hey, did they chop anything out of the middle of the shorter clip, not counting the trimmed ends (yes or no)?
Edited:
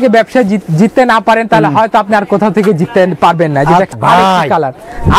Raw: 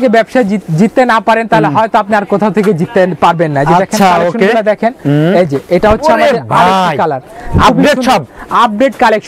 yes